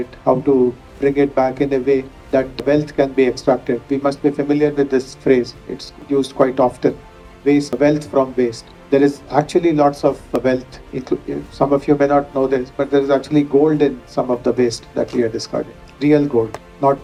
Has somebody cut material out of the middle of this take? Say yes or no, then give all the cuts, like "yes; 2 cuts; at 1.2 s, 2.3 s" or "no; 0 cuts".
no; 0 cuts